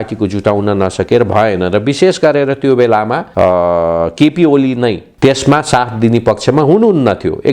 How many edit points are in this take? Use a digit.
2